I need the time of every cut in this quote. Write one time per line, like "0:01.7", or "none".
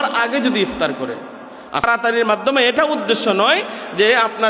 0:01.8